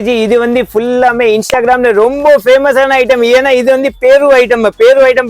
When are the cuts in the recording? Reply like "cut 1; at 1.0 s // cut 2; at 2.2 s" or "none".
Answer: none